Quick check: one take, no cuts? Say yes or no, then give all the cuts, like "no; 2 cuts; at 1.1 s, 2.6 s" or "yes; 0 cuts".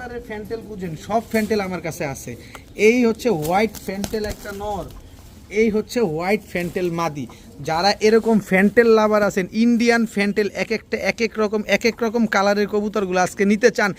yes; 0 cuts